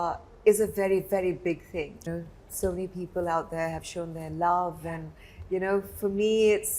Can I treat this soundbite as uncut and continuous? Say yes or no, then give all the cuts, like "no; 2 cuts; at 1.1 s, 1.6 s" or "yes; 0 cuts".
yes; 0 cuts